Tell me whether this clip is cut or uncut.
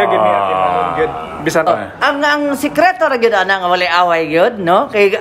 cut